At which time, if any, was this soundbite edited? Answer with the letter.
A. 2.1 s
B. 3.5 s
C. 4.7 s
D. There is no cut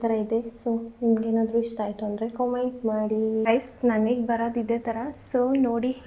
B